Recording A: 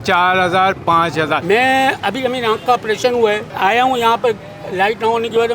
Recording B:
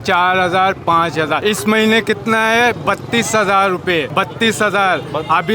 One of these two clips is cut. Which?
A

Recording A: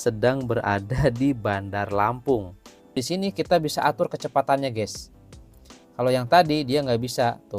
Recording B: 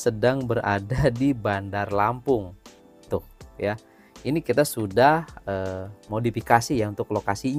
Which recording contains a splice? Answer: A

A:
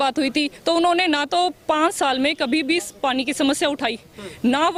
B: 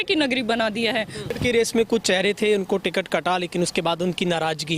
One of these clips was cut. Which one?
B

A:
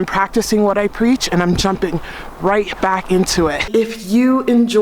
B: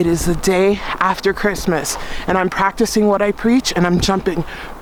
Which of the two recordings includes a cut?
A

